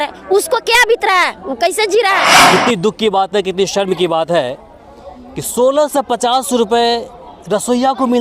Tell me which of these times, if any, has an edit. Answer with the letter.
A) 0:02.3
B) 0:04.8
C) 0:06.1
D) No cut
A